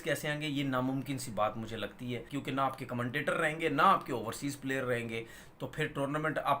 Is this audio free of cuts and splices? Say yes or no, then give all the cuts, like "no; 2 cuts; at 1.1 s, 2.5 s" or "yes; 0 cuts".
no; 1 cut; at 2.3 s